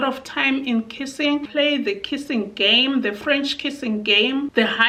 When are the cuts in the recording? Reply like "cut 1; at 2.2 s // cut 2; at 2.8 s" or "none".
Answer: none